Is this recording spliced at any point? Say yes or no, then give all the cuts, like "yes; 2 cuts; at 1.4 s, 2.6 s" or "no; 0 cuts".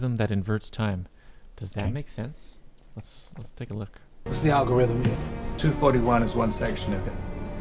no; 0 cuts